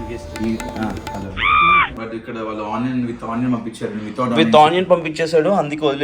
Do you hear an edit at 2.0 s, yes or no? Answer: yes